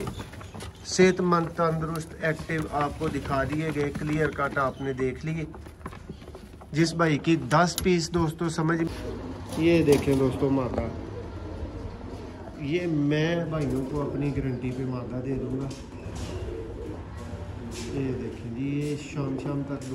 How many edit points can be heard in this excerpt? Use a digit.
1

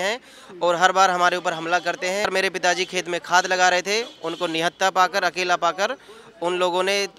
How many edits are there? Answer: 1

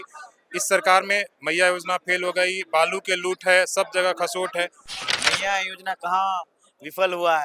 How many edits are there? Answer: 1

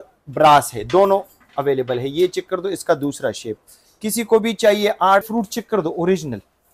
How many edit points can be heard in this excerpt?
1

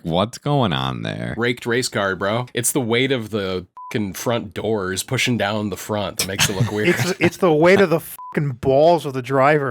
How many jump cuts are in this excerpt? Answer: 3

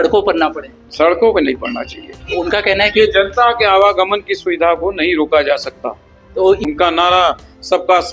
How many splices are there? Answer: 1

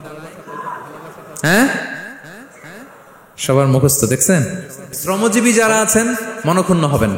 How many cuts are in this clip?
1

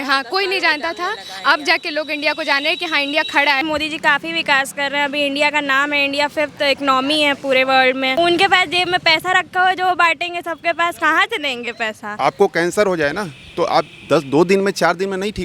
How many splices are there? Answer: 3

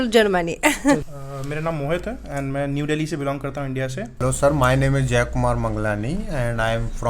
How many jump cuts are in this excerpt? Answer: 1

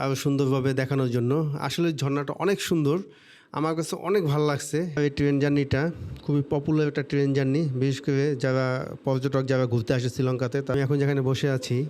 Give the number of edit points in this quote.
2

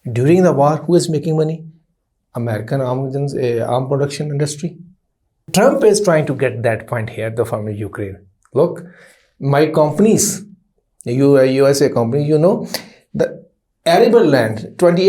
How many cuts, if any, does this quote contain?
1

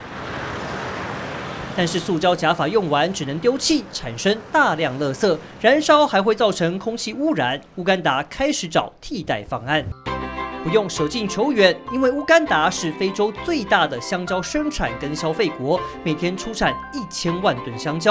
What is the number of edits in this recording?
1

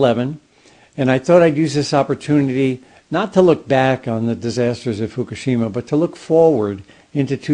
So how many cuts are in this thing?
0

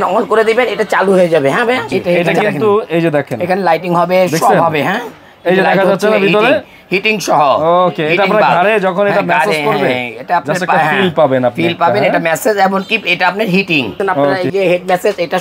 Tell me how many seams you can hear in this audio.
2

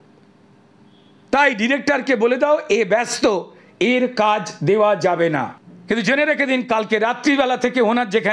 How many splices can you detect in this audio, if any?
1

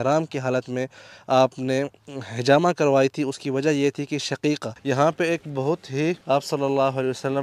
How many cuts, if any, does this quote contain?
2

